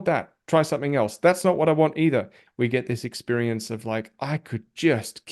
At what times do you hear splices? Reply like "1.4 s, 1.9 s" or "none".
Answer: 2.4 s